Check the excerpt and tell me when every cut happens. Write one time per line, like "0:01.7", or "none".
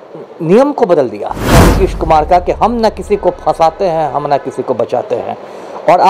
0:01.6